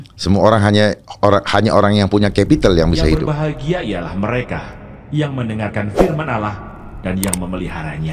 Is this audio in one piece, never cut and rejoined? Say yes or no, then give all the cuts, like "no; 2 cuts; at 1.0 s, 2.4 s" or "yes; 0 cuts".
no; 1 cut; at 3.2 s